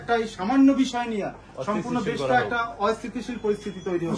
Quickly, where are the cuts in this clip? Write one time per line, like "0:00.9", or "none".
none